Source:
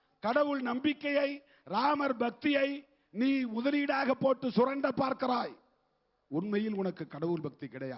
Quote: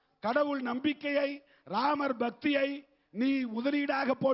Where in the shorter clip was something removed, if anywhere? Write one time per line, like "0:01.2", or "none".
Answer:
none